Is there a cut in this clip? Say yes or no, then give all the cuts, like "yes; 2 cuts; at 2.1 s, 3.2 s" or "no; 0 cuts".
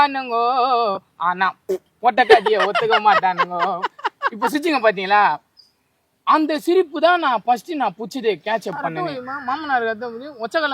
yes; 1 cut; at 8.9 s